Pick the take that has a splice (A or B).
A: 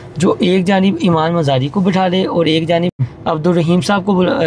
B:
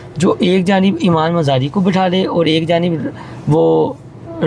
A